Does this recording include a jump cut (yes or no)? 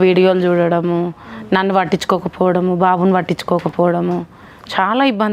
no